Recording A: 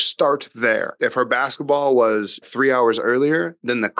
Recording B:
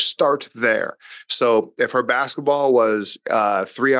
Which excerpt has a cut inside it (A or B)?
A